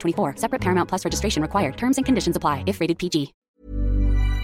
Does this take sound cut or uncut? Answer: cut